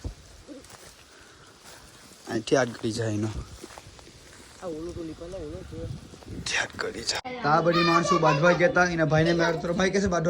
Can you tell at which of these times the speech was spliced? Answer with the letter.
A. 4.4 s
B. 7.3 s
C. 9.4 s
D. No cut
B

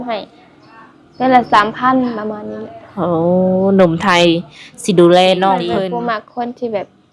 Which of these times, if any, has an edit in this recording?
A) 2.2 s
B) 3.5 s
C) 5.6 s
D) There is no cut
C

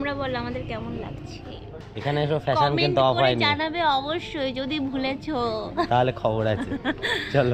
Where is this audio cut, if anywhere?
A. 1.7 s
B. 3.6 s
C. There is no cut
A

